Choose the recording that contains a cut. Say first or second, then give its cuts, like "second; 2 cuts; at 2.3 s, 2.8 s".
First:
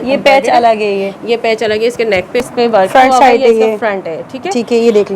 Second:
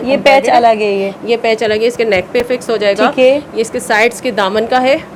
first; 1 cut; at 2.5 s